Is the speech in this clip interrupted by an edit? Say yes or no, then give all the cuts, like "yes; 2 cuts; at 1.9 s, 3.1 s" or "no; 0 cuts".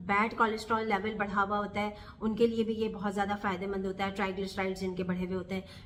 no; 0 cuts